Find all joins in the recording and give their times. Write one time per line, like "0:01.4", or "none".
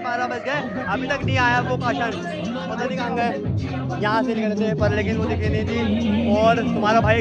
none